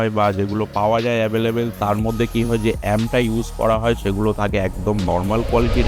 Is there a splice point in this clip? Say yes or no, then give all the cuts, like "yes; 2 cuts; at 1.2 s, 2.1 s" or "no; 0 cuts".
no; 0 cuts